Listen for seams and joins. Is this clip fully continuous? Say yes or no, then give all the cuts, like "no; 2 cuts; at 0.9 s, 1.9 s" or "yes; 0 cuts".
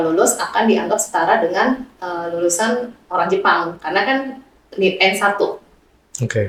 yes; 0 cuts